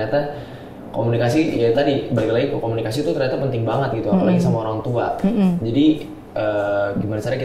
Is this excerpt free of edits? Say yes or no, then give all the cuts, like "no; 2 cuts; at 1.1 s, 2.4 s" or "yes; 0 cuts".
yes; 0 cuts